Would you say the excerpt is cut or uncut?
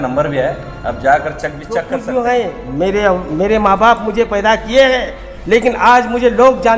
cut